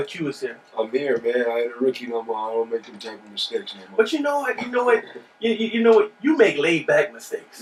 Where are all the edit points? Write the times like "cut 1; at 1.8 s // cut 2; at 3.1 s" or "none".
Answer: none